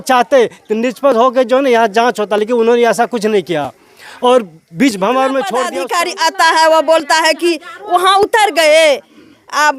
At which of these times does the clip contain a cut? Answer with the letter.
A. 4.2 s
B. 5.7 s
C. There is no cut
B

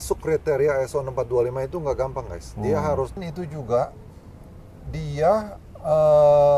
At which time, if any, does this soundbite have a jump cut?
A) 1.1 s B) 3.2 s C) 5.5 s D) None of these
B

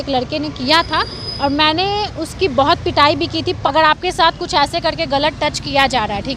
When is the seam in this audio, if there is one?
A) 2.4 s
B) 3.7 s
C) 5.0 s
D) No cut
B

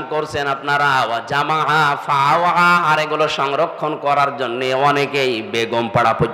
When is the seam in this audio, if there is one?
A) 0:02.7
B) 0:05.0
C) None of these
C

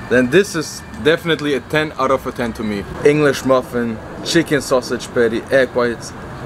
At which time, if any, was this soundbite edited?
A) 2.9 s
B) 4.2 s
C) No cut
A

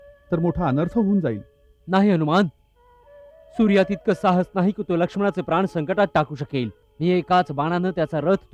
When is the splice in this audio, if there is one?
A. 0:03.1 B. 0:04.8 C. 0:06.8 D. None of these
C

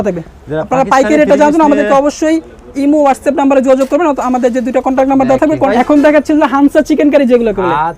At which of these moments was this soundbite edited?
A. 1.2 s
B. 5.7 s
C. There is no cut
B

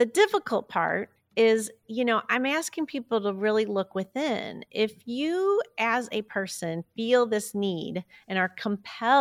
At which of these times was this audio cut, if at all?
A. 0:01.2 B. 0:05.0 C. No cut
A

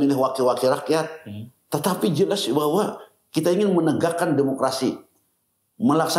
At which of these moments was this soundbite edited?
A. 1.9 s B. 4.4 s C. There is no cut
C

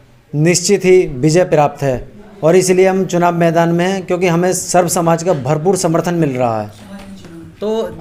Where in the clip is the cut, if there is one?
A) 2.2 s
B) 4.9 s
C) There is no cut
C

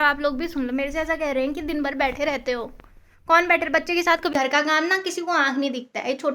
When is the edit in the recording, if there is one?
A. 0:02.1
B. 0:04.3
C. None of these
B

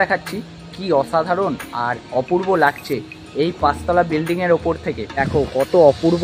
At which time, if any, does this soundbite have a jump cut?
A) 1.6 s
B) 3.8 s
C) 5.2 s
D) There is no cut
C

